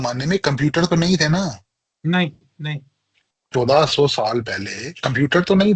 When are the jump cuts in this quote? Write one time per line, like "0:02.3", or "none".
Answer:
none